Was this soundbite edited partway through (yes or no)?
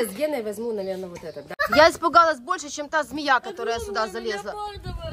yes